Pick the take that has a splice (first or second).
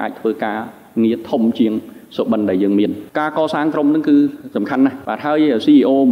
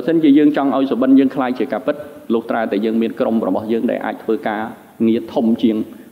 first